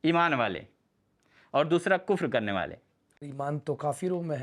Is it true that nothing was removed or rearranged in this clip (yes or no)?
no